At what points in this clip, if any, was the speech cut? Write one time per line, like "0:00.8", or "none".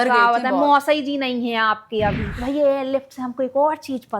0:02.3